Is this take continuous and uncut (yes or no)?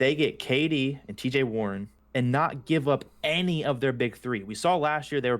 no